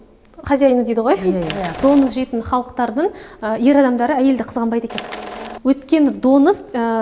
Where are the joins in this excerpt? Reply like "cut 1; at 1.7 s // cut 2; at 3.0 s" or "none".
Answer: cut 1; at 1.7 s